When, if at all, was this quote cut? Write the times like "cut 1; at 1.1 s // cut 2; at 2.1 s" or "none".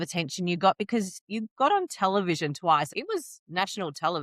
cut 1; at 1.3 s // cut 2; at 2.9 s